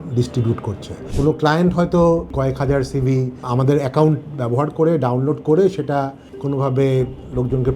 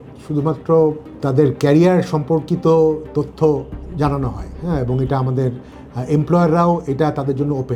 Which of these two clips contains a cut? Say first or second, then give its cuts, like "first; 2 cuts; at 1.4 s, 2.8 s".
first; 2 cuts; at 1.1 s, 2.3 s